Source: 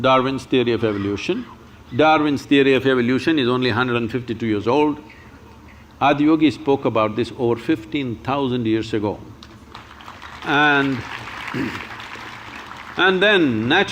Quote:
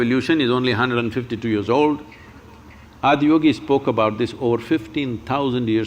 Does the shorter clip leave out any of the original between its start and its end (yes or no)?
no